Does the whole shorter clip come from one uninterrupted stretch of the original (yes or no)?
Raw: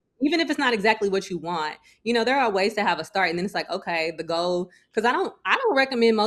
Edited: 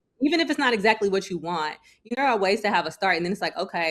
no